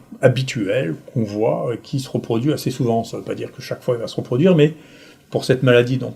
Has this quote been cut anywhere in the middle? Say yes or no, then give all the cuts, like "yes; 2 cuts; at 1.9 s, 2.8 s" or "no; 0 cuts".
no; 0 cuts